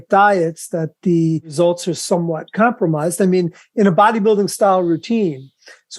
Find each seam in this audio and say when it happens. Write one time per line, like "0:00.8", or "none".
0:01.5